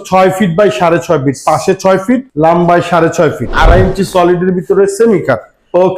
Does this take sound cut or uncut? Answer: cut